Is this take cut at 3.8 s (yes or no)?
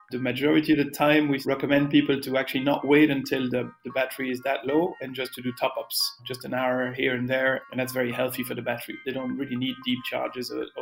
no